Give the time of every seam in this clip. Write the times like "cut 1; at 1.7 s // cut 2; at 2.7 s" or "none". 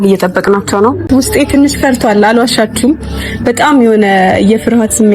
cut 1; at 1.0 s

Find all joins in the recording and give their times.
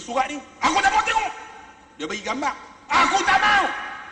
none

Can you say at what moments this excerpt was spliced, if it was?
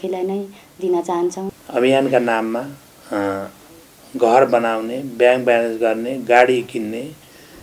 cut 1; at 1.5 s

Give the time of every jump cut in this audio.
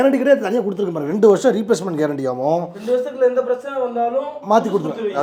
none

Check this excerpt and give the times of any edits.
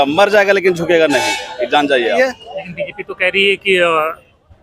cut 1; at 2.2 s

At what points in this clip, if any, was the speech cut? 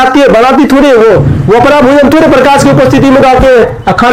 none

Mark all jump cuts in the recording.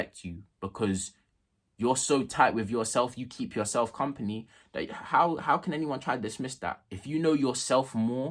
cut 1; at 6.9 s

